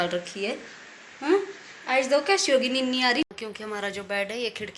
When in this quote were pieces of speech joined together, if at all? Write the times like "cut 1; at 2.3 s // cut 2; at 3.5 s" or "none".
cut 1; at 3.2 s